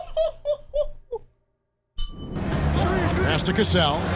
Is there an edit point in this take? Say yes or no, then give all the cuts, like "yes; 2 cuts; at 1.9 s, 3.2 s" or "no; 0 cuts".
yes; 1 cut; at 2.4 s